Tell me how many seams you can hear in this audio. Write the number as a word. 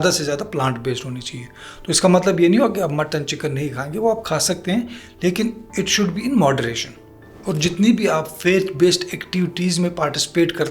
one